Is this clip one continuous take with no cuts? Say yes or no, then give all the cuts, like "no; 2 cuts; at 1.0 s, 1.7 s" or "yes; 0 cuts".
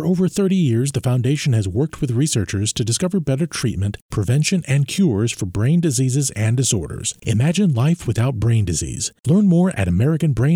yes; 0 cuts